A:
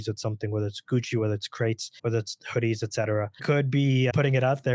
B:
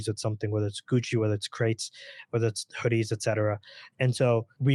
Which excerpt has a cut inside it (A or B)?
A